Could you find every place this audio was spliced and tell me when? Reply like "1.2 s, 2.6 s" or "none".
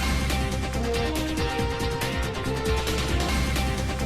2.0 s